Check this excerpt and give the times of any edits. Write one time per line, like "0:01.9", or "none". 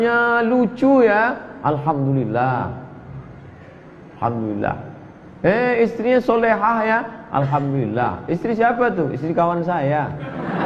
none

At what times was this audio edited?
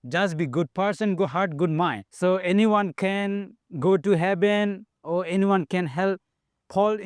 0:02.0

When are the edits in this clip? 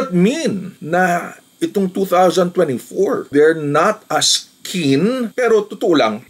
0:05.3

